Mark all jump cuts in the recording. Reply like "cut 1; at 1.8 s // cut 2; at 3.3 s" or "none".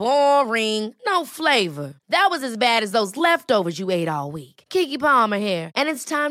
none